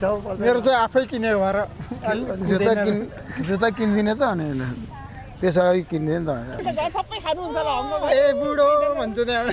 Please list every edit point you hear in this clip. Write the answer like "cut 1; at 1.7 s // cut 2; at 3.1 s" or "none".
cut 1; at 6.5 s